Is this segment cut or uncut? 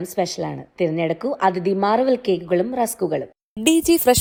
uncut